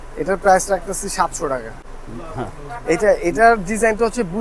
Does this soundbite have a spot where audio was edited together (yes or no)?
yes